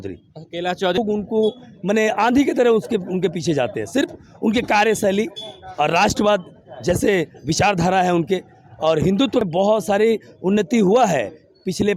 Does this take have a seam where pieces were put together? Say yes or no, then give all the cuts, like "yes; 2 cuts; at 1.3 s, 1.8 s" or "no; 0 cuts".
yes; 2 cuts; at 1.0 s, 9.4 s